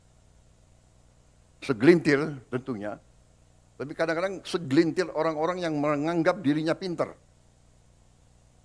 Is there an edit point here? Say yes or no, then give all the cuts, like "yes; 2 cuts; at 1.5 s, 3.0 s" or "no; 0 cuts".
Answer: no; 0 cuts